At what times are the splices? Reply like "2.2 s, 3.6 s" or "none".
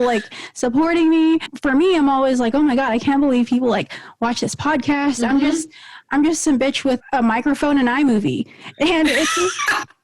1.5 s, 7.0 s